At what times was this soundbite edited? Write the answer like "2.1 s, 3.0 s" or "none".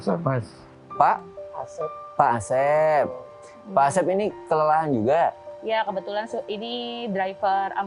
none

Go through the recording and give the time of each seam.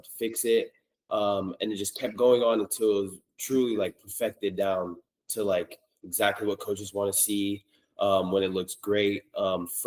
none

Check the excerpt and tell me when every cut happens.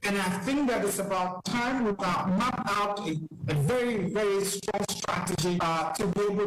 2.0 s, 5.1 s

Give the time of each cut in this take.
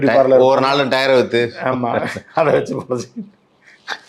none

